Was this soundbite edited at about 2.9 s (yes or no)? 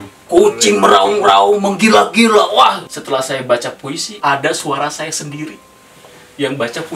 yes